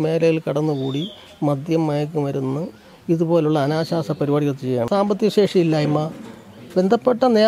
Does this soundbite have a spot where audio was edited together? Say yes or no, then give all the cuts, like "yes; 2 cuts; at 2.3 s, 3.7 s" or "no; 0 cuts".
yes; 1 cut; at 4.9 s